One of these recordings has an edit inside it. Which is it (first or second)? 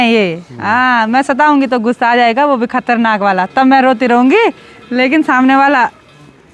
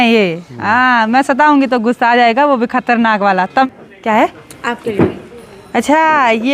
second